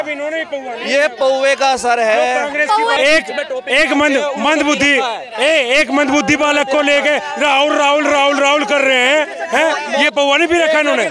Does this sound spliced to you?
yes; 1 cut; at 3.0 s

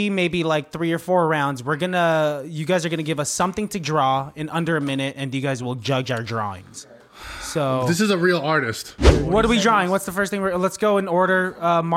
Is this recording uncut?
no; 1 cut; at 9.1 s

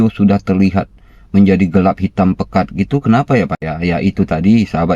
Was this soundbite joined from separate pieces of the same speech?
no; 0 cuts

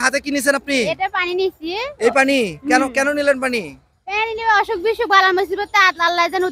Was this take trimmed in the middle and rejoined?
no; 0 cuts

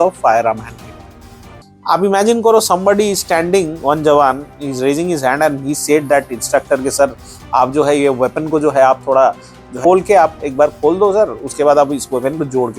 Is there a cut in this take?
yes; 1 cut; at 1.7 s

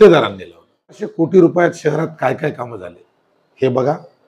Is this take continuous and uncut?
no; 1 cut; at 1.1 s

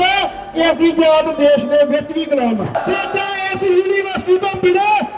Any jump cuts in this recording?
yes; 1 cut; at 2.8 s

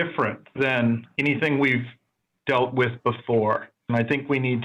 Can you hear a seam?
yes; 2 cuts; at 1.1 s, 3.8 s

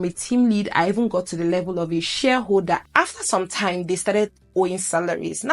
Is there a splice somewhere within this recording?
yes; 1 cut; at 2.8 s

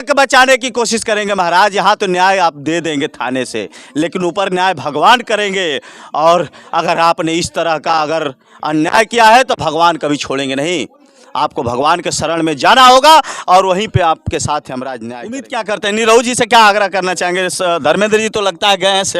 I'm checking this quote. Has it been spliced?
yes; 1 cut; at 15.1 s

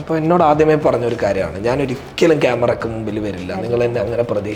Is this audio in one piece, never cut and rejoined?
yes; 0 cuts

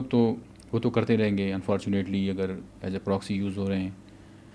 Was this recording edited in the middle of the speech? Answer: no; 0 cuts

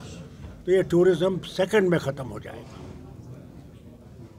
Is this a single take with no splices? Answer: yes; 0 cuts

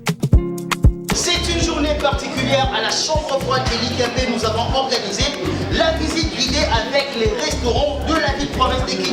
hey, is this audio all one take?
yes; 0 cuts

